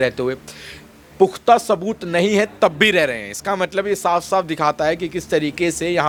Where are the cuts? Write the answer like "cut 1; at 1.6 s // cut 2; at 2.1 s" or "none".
none